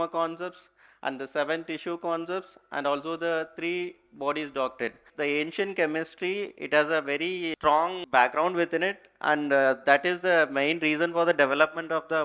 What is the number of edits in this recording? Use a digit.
2